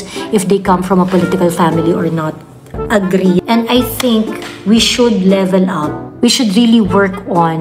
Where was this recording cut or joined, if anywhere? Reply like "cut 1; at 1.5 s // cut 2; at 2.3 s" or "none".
cut 1; at 3.4 s